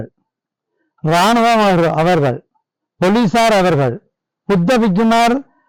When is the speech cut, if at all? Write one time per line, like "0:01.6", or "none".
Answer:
none